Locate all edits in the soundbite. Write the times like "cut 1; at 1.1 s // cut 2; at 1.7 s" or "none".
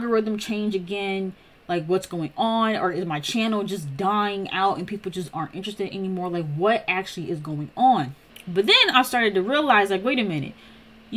cut 1; at 8.3 s